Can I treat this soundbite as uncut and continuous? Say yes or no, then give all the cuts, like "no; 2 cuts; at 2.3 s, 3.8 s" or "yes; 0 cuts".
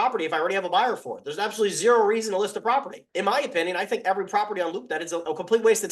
yes; 0 cuts